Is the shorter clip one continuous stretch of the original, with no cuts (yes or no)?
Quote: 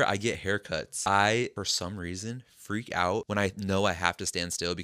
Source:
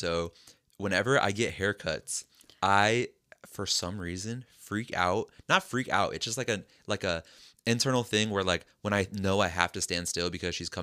no